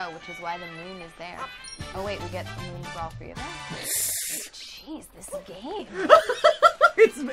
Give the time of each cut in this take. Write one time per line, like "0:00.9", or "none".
none